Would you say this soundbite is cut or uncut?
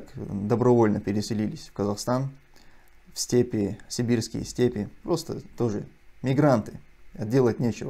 uncut